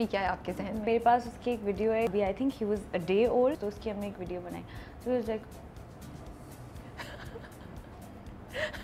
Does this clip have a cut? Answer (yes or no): yes